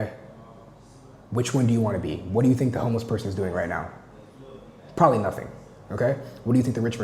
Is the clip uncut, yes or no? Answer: yes